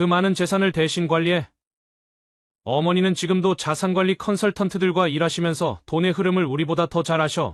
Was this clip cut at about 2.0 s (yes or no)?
no